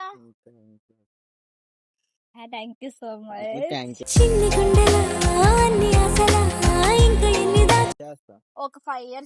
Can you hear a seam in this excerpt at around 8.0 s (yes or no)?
yes